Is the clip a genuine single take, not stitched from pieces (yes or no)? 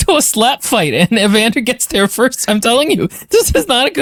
yes